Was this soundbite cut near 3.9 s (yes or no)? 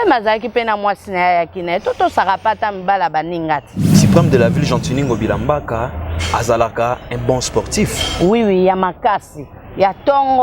yes